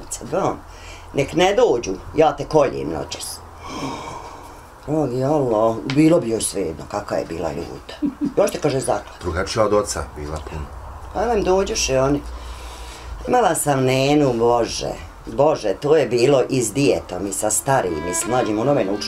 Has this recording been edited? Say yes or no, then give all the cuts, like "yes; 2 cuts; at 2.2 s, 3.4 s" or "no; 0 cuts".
no; 0 cuts